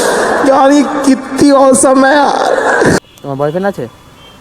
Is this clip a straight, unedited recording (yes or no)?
no